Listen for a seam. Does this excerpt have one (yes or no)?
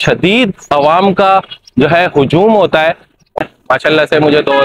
yes